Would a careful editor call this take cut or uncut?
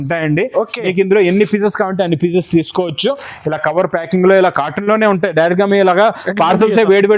uncut